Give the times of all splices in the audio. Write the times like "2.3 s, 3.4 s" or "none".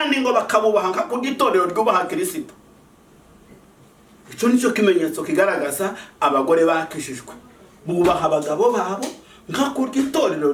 none